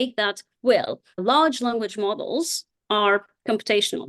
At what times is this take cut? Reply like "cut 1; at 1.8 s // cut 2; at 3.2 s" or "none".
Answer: cut 1; at 1.2 s